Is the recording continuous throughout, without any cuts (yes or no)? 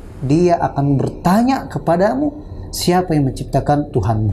yes